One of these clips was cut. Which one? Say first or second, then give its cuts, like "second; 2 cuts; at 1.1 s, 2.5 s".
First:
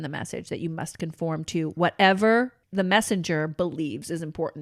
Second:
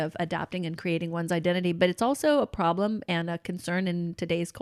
first; 1 cut; at 2.6 s